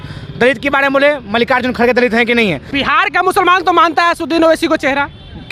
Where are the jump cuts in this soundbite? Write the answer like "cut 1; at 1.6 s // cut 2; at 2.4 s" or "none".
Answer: cut 1; at 2.7 s